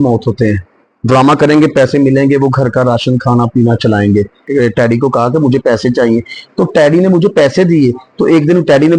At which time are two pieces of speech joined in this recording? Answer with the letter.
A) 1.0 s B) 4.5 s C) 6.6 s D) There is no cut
B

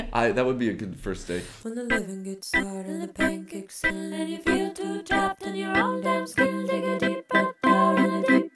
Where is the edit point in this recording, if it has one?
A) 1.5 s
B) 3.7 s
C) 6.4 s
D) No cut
A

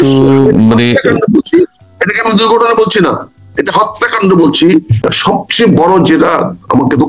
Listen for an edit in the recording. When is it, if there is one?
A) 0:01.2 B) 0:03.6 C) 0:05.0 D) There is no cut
C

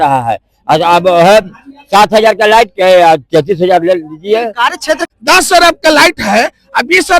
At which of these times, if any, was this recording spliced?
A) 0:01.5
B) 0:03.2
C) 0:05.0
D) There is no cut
C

